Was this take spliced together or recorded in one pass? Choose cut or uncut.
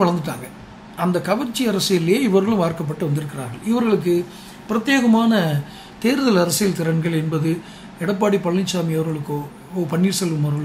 cut